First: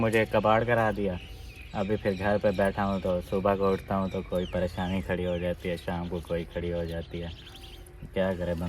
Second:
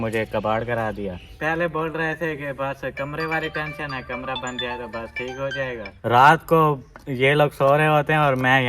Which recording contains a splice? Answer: second; 2 cuts; at 1.3 s, 5.9 s

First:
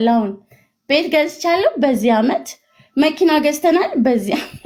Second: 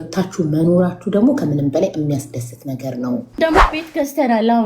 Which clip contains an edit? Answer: second; 1 cut; at 3.4 s

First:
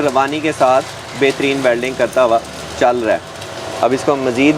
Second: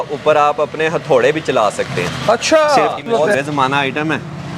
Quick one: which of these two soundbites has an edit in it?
second; 1 cut; at 3.1 s

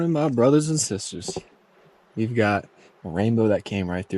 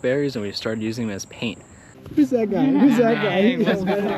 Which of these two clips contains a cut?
second; 1 cut; at 1.9 s

